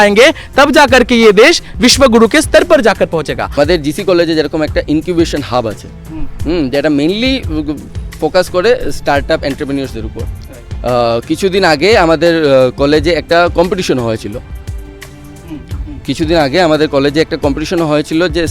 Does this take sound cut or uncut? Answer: cut